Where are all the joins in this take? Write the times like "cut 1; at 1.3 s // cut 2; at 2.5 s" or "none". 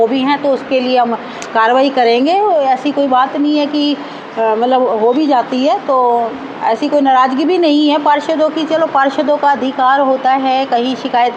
none